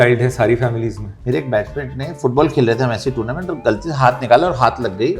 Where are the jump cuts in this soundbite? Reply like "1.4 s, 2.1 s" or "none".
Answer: 1.1 s